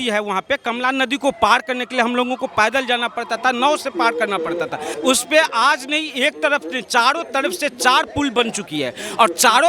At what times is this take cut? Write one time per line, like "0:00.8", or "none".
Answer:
0:04.9

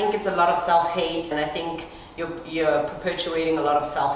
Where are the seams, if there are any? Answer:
0:01.3

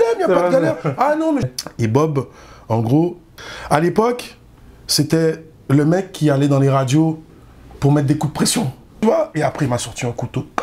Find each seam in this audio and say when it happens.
0:01.4
0:08.8

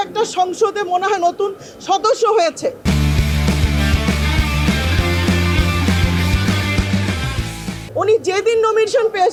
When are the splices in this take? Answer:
none

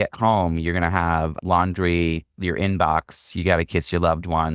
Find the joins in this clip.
0:01.3
0:02.3

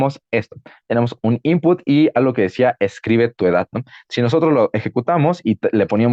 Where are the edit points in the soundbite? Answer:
none

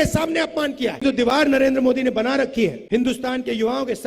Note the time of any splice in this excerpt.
0:01.0
0:02.8

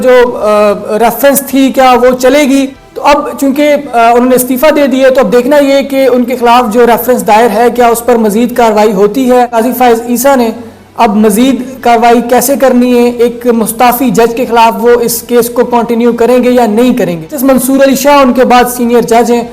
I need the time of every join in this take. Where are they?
0:02.8
0:09.5
0:17.3

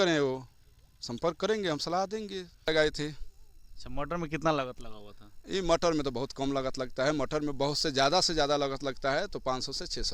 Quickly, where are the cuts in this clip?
0:02.6

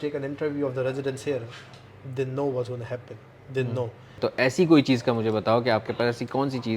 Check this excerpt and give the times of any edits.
0:04.1

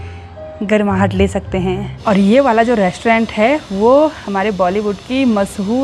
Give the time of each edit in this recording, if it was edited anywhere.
0:01.9

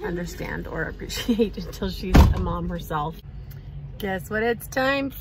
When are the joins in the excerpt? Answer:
0:03.8

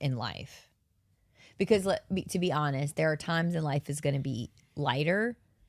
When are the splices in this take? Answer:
none

